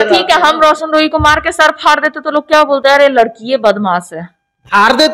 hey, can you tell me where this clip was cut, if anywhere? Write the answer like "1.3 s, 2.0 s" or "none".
none